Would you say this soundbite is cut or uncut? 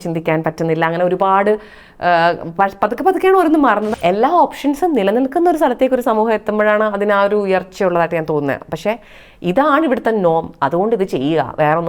cut